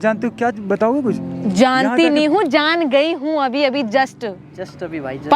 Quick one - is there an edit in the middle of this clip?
no; 0 cuts

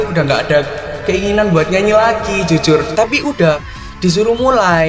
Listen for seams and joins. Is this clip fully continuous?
no; 1 cut; at 2.9 s

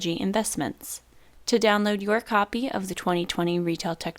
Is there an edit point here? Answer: yes; 1 cut; at 1.2 s

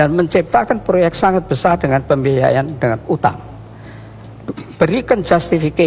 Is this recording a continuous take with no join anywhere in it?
yes; 0 cuts

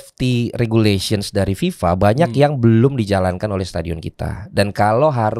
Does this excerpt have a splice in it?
no; 0 cuts

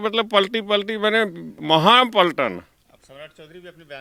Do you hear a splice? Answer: no; 0 cuts

